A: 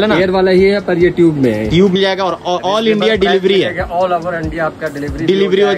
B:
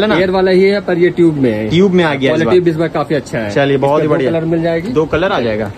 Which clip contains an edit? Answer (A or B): A